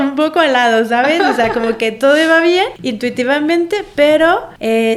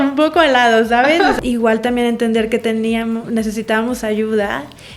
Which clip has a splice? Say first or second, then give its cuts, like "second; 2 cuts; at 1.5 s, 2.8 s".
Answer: second; 1 cut; at 1.4 s